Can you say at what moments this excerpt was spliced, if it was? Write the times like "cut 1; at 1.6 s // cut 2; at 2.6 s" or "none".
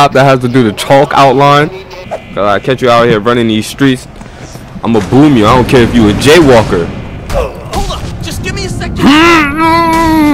cut 1; at 1.8 s // cut 2; at 7.2 s